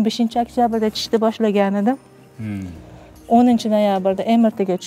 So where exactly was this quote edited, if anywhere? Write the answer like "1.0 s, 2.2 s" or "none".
none